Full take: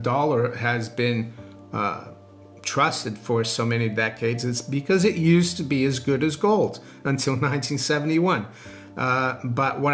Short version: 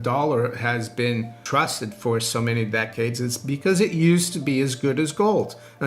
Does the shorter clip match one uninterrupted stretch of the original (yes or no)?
no